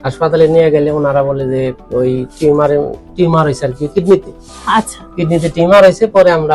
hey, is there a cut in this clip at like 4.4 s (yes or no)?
no